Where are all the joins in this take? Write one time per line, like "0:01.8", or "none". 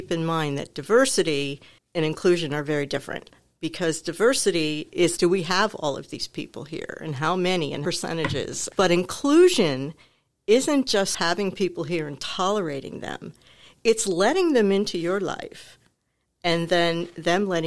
0:05.1
0:08.1